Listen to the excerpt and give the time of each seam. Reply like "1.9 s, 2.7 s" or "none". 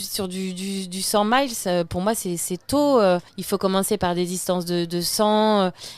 3.3 s